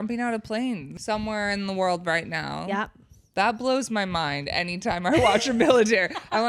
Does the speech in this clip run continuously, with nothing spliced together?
no; 1 cut; at 0.9 s

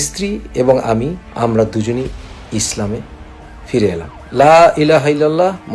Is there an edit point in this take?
yes; 2 cuts; at 1.2 s, 4.1 s

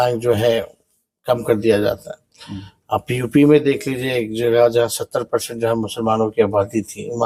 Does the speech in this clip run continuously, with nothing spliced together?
yes; 0 cuts

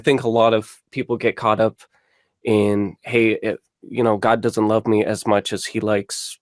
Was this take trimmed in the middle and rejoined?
no; 0 cuts

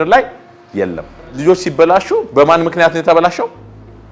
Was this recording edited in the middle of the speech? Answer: yes; 1 cut; at 1.3 s

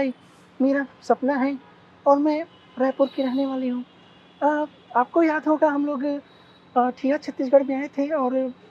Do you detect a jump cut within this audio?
no; 0 cuts

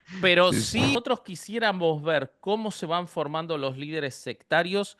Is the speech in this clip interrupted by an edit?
yes; 1 cut; at 0.9 s

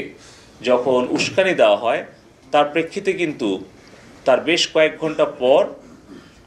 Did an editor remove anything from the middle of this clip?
no; 0 cuts

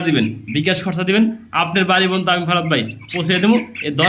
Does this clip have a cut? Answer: no; 0 cuts

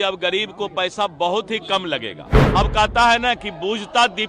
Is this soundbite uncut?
no; 1 cut; at 2.4 s

